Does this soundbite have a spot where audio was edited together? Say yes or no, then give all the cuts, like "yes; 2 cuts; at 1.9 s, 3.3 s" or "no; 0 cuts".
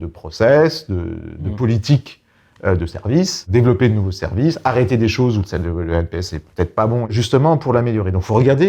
yes; 1 cut; at 7.1 s